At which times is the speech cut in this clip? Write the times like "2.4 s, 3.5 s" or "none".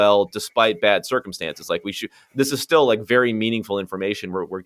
none